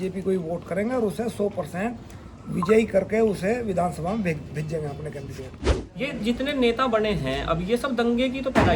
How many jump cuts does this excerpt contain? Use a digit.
1